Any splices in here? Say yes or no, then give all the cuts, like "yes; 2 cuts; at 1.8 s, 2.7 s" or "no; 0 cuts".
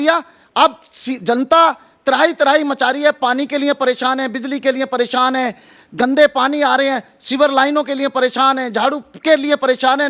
no; 0 cuts